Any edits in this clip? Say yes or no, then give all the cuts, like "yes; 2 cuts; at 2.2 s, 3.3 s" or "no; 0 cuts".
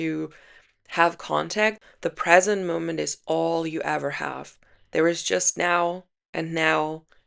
yes; 1 cut; at 1.8 s